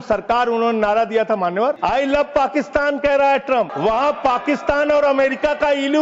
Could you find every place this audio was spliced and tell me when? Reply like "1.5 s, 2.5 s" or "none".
1.8 s, 3.7 s